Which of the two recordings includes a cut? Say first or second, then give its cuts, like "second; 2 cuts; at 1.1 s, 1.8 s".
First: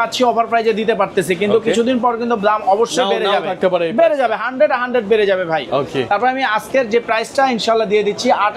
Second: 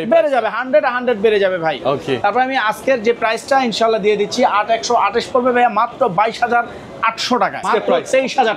second; 1 cut; at 7.6 s